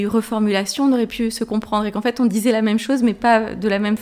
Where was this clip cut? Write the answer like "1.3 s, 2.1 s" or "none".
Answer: none